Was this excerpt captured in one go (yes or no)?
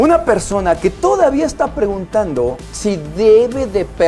no